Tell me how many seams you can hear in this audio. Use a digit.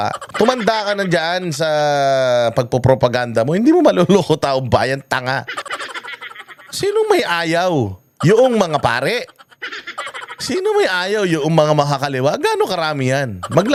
0